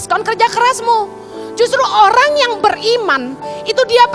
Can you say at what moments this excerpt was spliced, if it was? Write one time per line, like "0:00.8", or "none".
none